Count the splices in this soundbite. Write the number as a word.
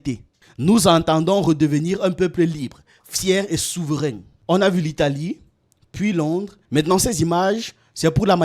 one